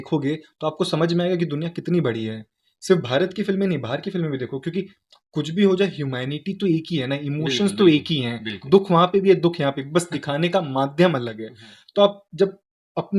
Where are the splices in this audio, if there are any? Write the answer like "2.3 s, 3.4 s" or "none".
none